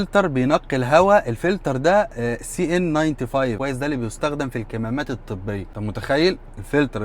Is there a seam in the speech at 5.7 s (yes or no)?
yes